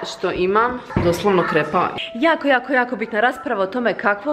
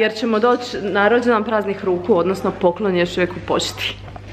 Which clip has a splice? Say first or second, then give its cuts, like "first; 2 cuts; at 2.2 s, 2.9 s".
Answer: first; 1 cut; at 1.9 s